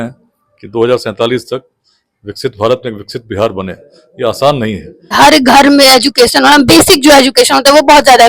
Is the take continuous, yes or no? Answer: no